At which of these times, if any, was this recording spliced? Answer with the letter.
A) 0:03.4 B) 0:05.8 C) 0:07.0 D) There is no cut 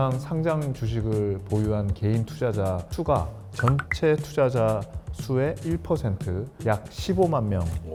D